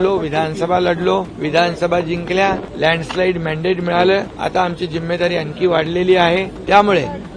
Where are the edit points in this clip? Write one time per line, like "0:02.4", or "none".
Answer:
0:01.3
0:02.7
0:04.3
0:06.5